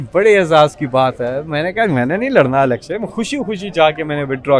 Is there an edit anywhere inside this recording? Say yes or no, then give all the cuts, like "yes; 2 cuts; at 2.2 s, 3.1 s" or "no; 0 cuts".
no; 0 cuts